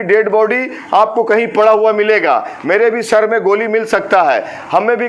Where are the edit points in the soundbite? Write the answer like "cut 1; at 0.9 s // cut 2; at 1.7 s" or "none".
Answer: none